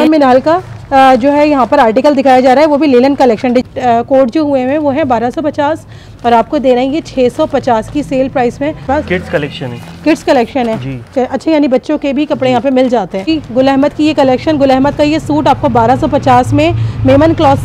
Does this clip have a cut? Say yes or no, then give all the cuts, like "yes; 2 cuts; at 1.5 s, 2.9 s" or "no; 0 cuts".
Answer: yes; 3 cuts; at 3.6 s, 8.8 s, 13.3 s